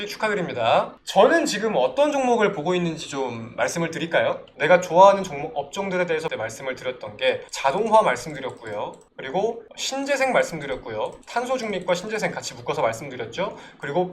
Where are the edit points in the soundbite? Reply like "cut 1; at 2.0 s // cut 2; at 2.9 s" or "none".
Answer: cut 1; at 1.0 s // cut 2; at 4.5 s